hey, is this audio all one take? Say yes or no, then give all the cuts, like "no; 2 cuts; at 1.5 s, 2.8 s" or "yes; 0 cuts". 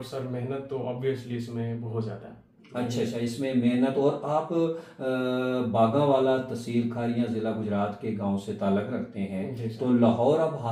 yes; 0 cuts